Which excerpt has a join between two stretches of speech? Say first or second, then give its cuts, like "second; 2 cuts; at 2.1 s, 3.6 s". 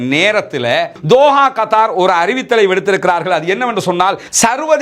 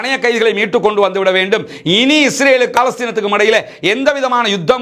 first; 1 cut; at 1.0 s